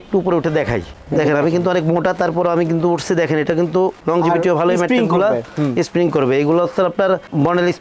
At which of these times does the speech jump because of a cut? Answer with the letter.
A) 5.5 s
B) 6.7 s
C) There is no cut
C